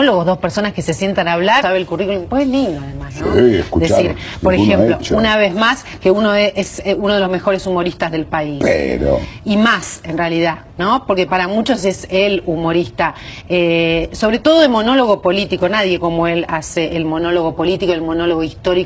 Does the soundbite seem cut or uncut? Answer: uncut